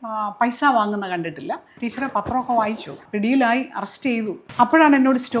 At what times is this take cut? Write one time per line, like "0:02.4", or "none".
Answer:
0:01.8
0:03.0
0:04.4